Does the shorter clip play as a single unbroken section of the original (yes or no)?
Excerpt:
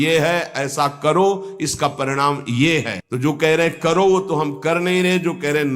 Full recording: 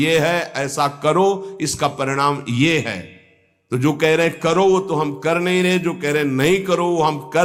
no